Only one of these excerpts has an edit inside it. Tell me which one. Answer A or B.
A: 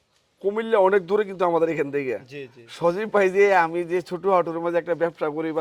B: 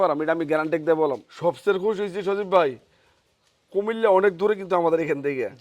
B